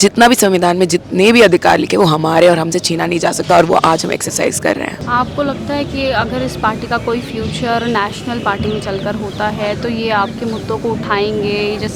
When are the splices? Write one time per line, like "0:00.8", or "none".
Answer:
none

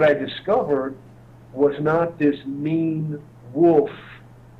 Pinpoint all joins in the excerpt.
none

